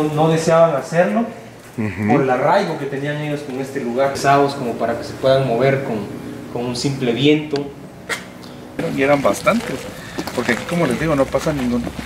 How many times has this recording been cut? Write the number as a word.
two